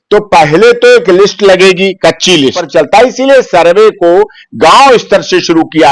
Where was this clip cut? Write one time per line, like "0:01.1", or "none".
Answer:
0:02.6